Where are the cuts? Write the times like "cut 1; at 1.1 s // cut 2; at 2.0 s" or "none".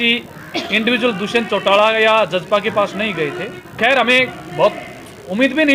cut 1; at 3.6 s